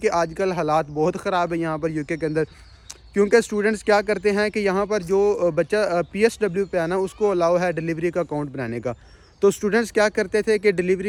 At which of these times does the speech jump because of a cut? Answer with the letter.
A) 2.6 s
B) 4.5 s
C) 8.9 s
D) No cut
D